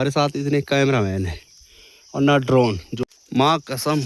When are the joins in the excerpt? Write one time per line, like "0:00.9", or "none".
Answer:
0:02.9